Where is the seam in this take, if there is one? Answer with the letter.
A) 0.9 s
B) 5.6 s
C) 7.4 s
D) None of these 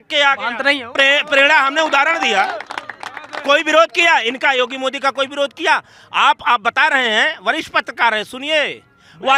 A